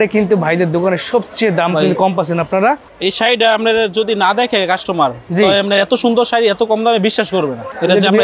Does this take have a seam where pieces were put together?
no; 0 cuts

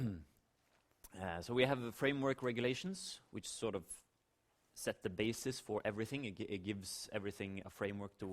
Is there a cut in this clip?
yes; 2 cuts; at 2.1 s, 6.2 s

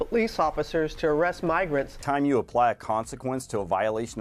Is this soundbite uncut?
no; 1 cut; at 2.0 s

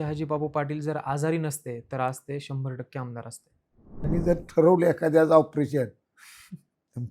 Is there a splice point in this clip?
yes; 1 cut; at 4.1 s

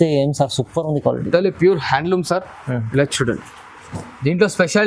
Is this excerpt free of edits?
yes; 0 cuts

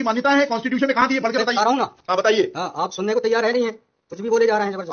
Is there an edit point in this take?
no; 0 cuts

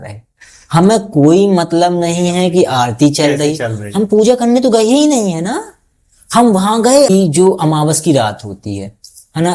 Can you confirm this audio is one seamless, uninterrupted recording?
no; 1 cut; at 7.1 s

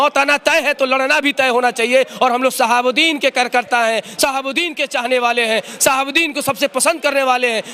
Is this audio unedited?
yes; 0 cuts

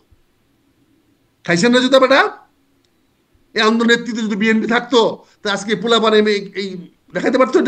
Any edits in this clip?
no; 0 cuts

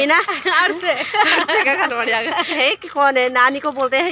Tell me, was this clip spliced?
yes; 1 cut; at 2.5 s

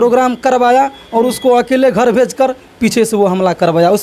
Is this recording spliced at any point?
no; 0 cuts

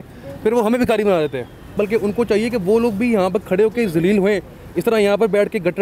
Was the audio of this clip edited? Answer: yes; 1 cut; at 1.7 s

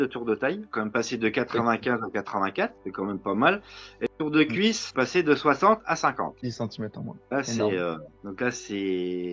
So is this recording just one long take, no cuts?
yes; 0 cuts

